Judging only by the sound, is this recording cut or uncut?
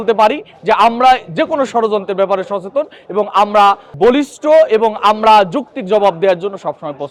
uncut